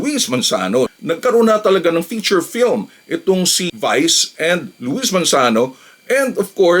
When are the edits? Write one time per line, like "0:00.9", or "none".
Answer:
0:00.9